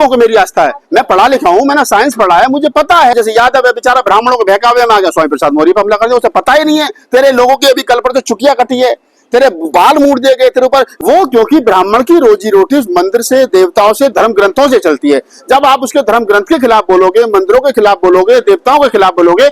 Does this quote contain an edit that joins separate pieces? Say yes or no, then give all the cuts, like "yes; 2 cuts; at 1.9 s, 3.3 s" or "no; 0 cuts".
yes; 2 cuts; at 3.1 s, 10.9 s